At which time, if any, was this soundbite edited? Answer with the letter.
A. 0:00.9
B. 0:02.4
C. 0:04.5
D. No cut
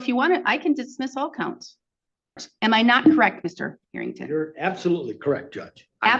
B